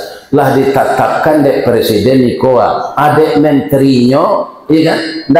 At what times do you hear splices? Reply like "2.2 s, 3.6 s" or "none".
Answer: none